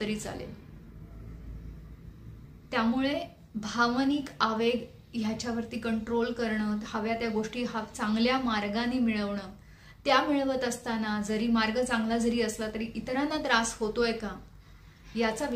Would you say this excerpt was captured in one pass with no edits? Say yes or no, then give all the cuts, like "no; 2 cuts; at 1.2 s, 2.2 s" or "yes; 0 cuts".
yes; 0 cuts